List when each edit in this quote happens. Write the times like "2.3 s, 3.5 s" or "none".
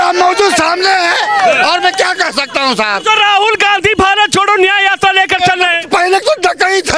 none